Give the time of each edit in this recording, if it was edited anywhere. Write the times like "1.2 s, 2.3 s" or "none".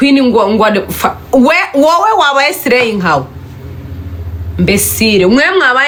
none